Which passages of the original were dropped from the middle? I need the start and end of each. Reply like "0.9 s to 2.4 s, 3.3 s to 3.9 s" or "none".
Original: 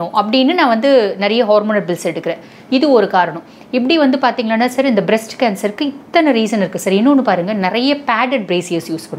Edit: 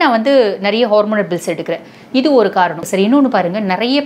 3.4 s to 6.8 s